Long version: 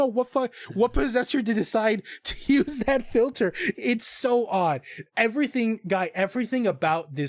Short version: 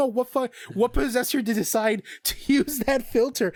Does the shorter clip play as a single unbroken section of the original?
yes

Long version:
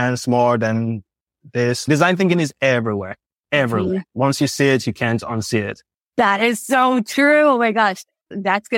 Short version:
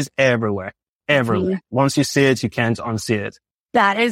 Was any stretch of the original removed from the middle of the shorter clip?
no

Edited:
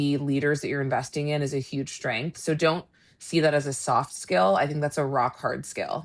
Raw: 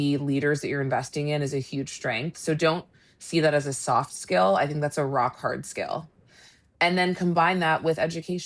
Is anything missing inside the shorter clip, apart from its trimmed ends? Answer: no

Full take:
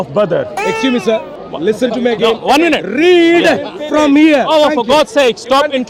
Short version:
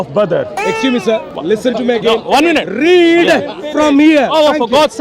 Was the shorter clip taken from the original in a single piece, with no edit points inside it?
no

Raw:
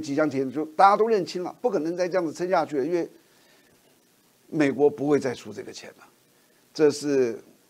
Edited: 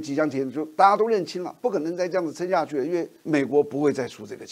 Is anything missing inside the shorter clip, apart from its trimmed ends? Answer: yes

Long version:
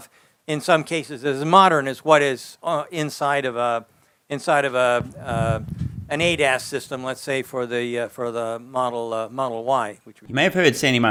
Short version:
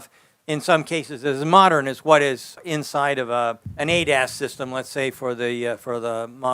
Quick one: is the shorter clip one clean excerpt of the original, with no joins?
no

